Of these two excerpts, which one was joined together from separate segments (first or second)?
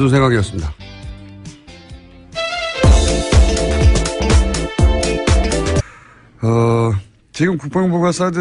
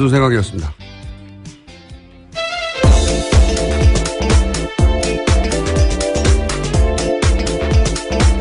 second